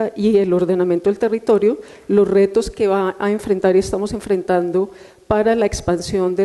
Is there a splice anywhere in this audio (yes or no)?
yes